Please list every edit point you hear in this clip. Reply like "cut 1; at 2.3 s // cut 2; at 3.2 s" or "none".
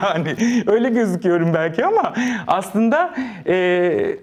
none